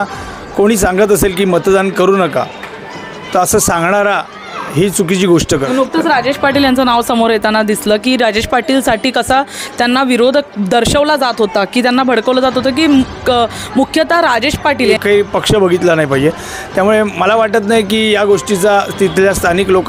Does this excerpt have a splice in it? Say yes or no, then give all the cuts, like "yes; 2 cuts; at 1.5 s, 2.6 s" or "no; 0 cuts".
yes; 2 cuts; at 5.7 s, 14.9 s